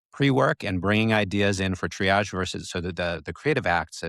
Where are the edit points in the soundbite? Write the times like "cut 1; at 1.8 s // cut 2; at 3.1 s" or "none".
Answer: none